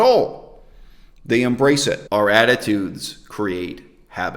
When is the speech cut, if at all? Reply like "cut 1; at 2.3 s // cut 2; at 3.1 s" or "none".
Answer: cut 1; at 2.0 s